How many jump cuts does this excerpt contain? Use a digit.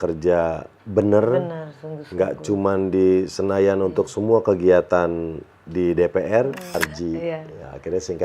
1